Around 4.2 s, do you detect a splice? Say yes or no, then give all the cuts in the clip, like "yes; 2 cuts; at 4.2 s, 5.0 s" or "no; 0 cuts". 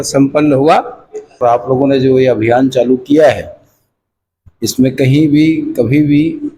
no; 1 cut; at 1.4 s